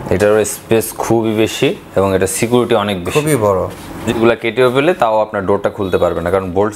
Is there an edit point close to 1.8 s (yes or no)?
no